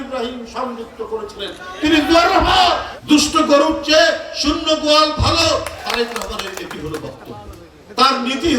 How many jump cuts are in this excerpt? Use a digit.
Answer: 2